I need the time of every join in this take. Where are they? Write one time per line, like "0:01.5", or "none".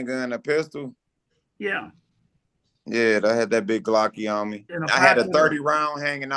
0:04.7